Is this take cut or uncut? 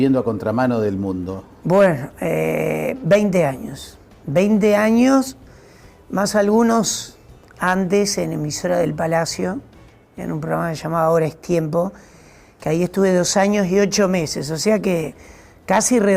cut